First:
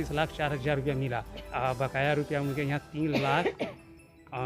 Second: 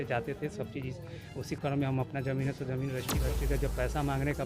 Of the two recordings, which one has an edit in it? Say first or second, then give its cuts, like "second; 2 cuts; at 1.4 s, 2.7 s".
second; 1 cut; at 3.2 s